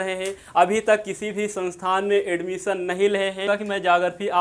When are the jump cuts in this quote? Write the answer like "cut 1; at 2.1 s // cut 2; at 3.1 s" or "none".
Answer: cut 1; at 3.4 s